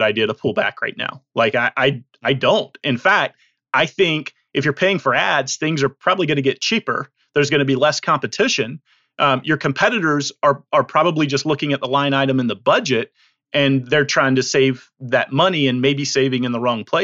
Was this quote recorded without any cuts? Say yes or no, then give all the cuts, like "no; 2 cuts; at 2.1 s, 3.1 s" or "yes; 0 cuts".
yes; 0 cuts